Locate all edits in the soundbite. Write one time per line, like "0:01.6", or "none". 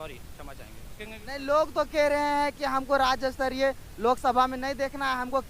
0:00.9